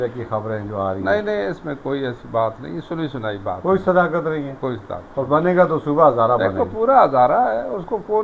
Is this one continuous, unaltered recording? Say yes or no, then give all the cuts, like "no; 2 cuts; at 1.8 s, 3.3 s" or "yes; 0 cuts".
yes; 0 cuts